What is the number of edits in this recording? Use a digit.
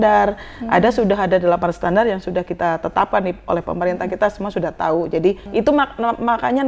1